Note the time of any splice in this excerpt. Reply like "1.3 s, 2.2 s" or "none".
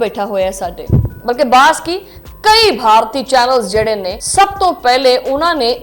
1.1 s, 4.1 s